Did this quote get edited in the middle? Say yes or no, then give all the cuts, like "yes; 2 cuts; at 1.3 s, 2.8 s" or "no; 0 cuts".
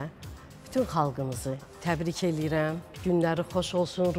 yes; 2 cuts; at 1.7 s, 2.9 s